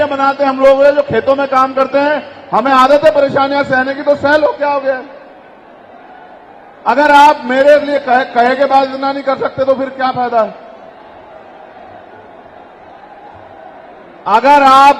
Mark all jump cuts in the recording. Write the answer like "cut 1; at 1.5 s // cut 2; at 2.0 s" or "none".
none